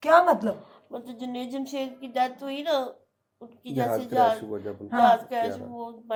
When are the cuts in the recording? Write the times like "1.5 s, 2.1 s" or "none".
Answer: none